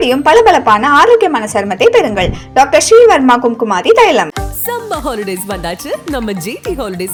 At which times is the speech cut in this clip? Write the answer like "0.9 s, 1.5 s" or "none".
none

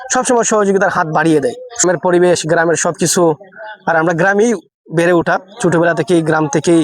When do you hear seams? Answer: 1.8 s

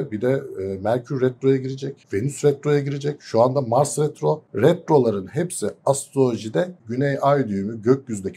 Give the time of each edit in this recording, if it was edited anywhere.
2.0 s, 4.5 s, 6.8 s

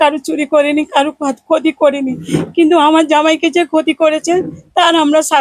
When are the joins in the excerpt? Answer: none

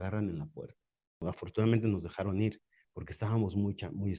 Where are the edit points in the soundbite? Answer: 1.2 s

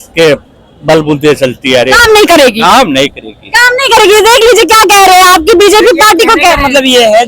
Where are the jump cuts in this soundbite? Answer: none

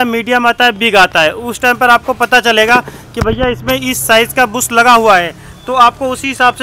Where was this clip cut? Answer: none

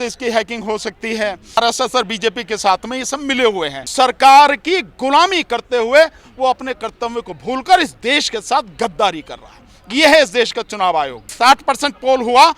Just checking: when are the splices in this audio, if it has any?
1.6 s, 3.9 s, 11.3 s

